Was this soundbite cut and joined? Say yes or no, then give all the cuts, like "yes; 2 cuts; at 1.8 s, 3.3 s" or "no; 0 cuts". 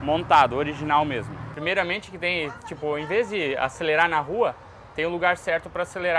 yes; 1 cut; at 1.4 s